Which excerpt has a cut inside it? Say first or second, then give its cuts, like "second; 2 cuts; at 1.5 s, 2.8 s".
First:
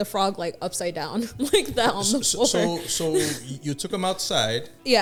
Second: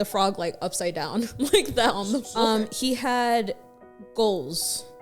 second; 1 cut; at 2.3 s